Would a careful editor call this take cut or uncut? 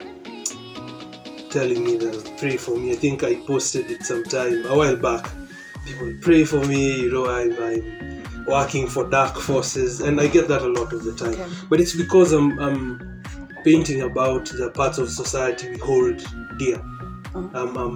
uncut